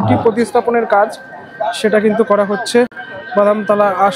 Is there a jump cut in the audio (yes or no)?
no